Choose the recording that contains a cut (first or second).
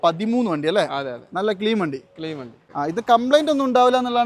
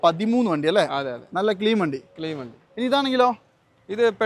first